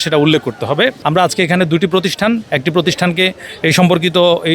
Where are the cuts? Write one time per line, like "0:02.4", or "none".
0:01.0